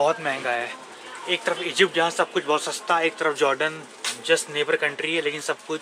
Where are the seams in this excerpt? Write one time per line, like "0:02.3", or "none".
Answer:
none